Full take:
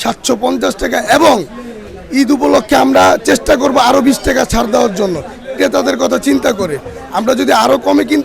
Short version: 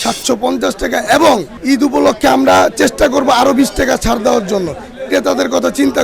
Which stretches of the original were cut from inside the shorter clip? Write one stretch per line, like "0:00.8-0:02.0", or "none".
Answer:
0:01.5-0:02.0